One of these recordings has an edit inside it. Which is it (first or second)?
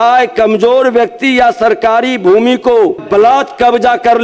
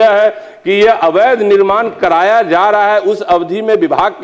first